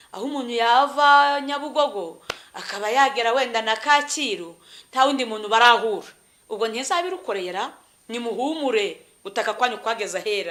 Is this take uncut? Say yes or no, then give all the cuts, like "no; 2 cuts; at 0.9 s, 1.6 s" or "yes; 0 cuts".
yes; 0 cuts